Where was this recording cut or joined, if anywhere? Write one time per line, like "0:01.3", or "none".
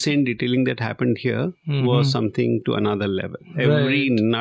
none